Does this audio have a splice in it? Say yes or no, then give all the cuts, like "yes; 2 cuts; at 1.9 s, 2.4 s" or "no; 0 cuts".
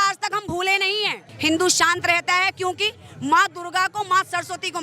yes; 1 cut; at 1.2 s